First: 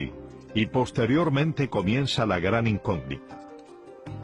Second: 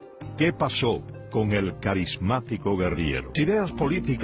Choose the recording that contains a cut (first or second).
second